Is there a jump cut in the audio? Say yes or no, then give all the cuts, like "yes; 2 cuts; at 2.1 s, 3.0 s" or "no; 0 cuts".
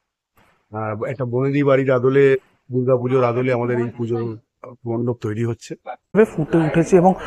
yes; 1 cut; at 6.2 s